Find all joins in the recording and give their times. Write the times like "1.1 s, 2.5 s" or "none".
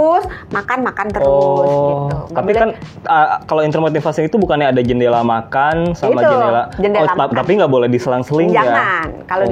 none